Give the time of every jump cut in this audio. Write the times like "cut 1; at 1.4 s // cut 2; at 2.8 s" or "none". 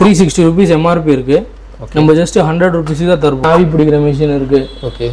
cut 1; at 3.4 s